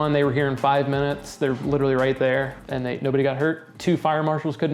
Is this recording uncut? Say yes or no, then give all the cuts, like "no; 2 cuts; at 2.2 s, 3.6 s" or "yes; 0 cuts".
no; 2 cuts; at 2.6 s, 3.7 s